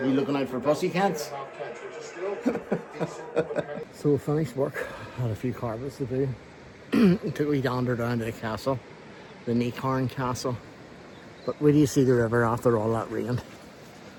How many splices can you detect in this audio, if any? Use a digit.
0